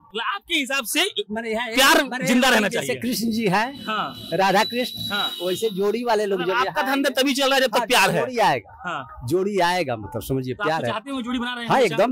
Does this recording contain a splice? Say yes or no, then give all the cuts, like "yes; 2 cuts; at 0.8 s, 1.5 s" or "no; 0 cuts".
no; 0 cuts